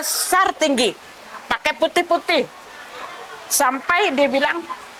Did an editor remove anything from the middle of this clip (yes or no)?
no